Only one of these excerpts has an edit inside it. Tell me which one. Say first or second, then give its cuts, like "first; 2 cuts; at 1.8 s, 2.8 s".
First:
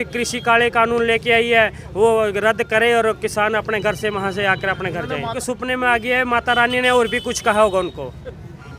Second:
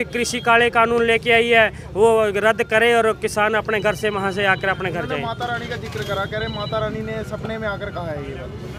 first; 1 cut; at 5.3 s